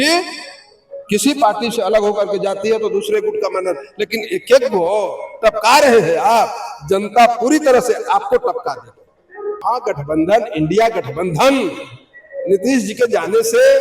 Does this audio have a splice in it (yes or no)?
yes